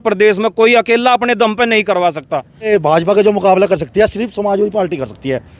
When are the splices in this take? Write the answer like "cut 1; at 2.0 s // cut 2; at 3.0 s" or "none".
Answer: cut 1; at 2.7 s